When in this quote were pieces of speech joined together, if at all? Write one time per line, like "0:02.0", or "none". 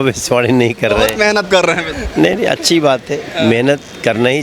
0:01.9